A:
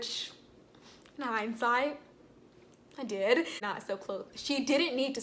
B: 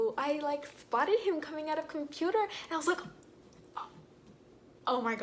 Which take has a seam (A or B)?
A